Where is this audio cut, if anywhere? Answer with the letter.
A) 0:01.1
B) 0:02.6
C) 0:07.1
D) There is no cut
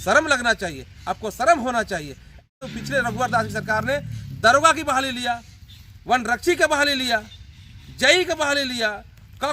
B